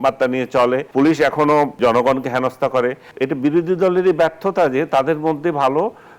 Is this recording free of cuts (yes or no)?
no